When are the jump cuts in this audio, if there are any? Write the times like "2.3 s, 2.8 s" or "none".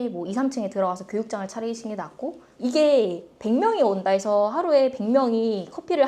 2.5 s